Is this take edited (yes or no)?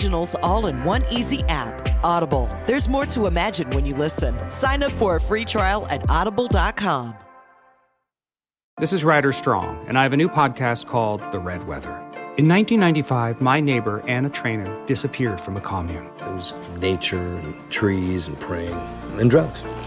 no